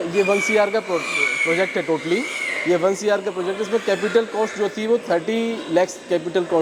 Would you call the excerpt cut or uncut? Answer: uncut